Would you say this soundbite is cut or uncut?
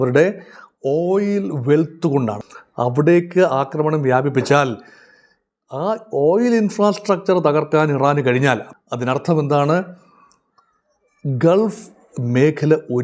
cut